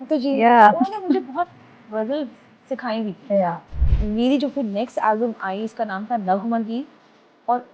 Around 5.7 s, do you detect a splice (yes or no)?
no